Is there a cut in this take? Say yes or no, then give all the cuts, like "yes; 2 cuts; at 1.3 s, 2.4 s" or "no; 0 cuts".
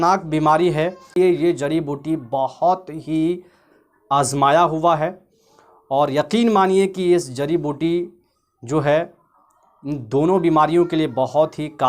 yes; 1 cut; at 1.1 s